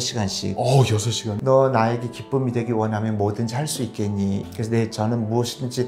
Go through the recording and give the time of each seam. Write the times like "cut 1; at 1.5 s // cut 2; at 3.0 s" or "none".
cut 1; at 1.4 s // cut 2; at 4.4 s